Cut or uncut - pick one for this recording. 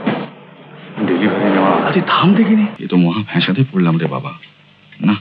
cut